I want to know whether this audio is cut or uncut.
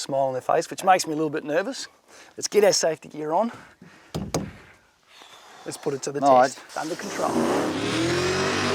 cut